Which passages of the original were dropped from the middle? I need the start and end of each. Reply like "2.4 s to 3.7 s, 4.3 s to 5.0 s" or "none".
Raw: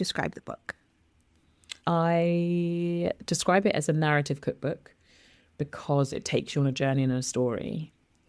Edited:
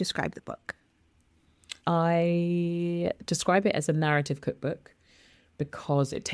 none

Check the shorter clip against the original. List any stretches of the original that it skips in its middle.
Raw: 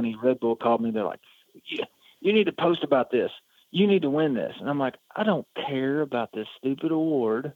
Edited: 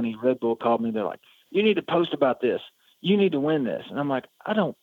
1.3 s to 2.0 s

